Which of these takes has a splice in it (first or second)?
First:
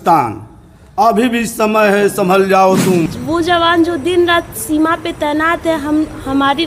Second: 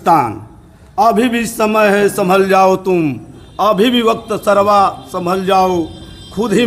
first